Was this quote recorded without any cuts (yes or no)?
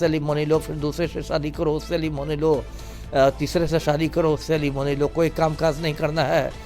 yes